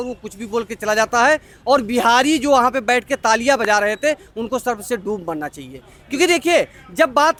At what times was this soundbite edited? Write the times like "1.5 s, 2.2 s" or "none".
none